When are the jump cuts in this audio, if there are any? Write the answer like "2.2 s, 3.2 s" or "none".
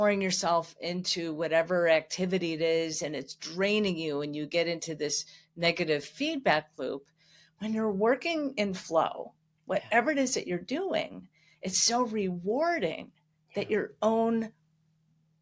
none